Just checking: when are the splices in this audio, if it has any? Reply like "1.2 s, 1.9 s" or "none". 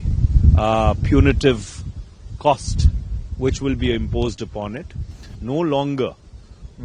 5.3 s